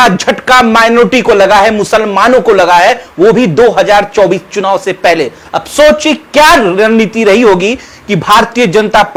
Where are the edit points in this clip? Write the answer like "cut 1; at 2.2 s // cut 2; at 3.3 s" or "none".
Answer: none